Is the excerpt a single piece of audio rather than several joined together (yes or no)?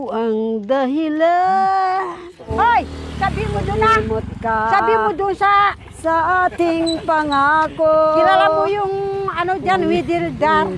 no